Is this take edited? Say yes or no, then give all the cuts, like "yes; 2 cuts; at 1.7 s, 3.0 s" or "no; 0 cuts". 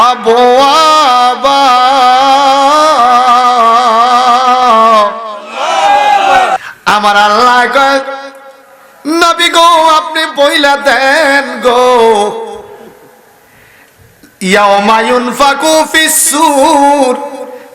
yes; 1 cut; at 6.6 s